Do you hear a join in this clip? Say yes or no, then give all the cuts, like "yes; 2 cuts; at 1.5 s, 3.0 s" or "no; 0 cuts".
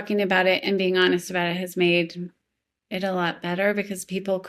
no; 0 cuts